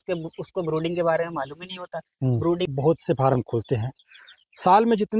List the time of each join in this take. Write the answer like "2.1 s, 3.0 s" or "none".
2.7 s